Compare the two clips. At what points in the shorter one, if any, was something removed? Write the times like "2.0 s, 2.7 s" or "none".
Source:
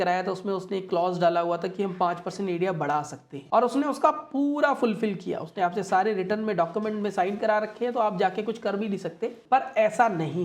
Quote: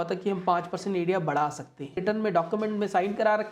1.9 s